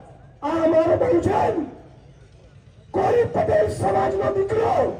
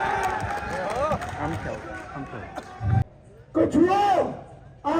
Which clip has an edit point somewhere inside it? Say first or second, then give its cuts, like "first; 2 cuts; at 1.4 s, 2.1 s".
second; 1 cut; at 3.2 s